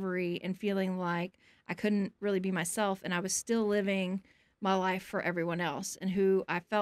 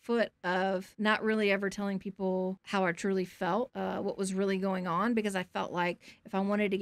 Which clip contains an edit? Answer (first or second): second